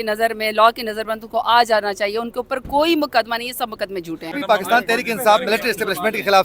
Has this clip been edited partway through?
yes; 1 cut; at 4.4 s

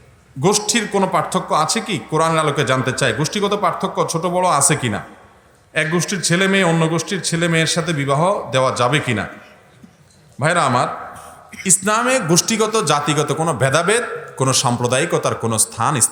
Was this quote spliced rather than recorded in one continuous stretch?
no; 0 cuts

